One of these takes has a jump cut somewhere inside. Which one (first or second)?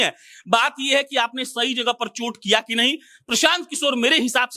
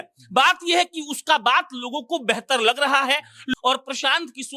second